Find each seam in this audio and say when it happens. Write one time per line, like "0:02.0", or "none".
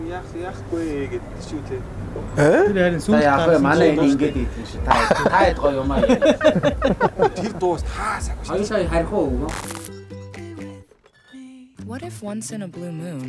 0:09.6

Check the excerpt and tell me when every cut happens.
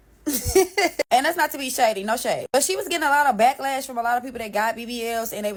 none

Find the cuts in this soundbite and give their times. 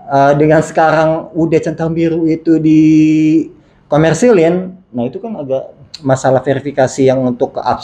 none

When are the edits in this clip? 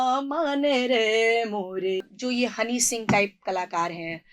0:02.1

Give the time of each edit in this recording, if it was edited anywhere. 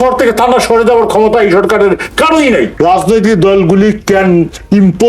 0:02.7

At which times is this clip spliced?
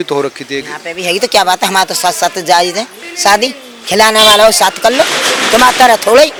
none

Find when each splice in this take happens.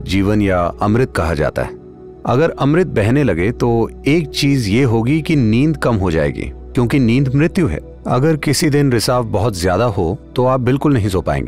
none

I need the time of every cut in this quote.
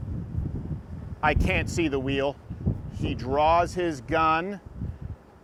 none

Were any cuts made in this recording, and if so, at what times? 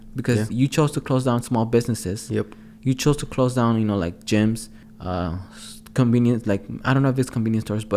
none

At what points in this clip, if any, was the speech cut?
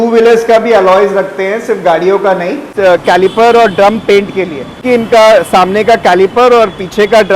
0:02.7
0:04.8

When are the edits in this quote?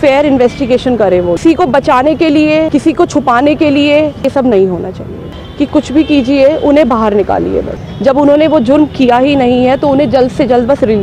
0:01.4
0:02.7
0:04.3
0:05.3
0:07.8

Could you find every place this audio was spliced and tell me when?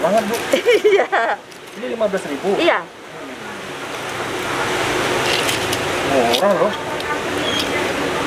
none

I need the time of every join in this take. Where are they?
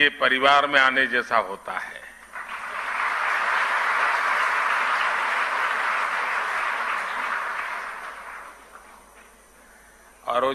none

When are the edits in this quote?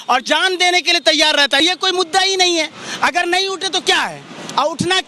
0:01.6

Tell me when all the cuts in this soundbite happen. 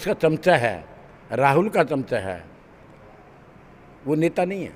none

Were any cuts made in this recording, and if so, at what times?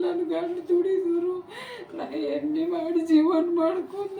none

